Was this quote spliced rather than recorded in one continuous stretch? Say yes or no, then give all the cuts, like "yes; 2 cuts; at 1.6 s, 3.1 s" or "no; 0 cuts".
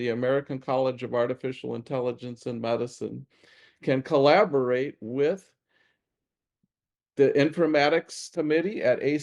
yes; 1 cut; at 8.2 s